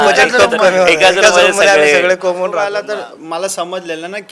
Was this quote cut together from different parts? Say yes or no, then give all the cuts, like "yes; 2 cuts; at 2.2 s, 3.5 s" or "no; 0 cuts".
yes; 1 cut; at 2.6 s